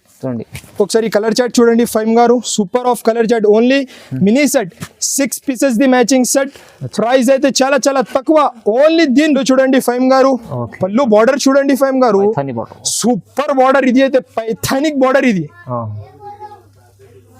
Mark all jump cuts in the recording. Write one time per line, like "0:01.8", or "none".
0:09.4

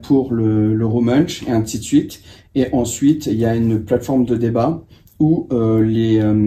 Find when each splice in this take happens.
none

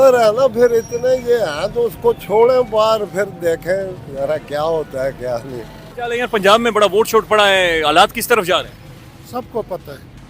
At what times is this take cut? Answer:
none

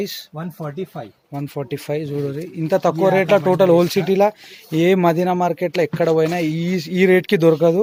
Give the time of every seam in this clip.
none

